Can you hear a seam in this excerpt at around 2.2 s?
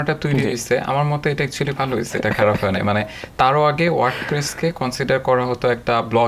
no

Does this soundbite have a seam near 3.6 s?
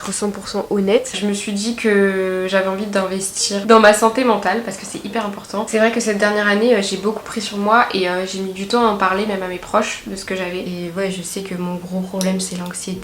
yes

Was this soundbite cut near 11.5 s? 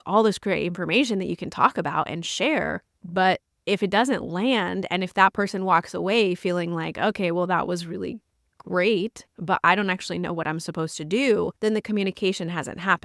yes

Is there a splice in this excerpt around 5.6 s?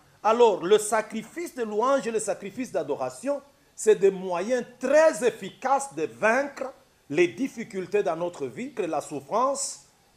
no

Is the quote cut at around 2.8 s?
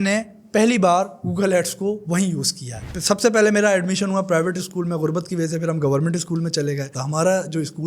yes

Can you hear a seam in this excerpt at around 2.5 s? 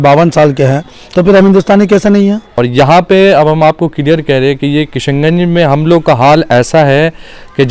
yes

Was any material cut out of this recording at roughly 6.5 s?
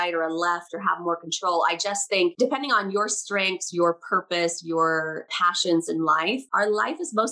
yes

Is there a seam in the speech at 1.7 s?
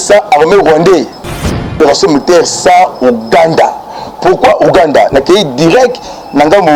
yes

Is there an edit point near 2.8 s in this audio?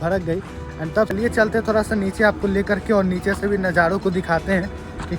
no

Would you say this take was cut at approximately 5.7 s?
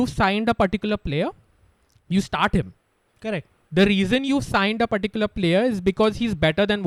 no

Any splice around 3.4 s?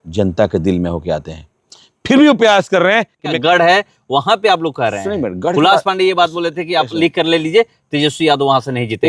yes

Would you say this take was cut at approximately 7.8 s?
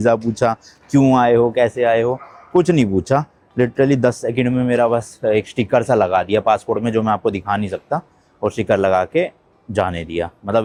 no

